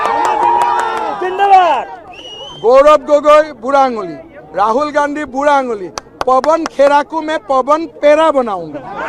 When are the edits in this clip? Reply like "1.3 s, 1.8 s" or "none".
none